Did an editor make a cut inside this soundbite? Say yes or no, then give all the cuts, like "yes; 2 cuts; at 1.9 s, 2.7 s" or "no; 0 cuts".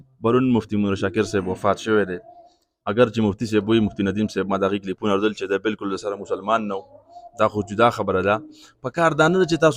no; 0 cuts